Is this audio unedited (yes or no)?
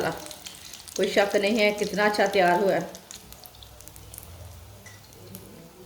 no